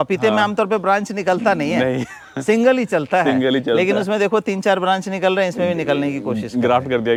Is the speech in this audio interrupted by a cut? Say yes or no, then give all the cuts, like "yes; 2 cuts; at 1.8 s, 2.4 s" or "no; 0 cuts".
no; 0 cuts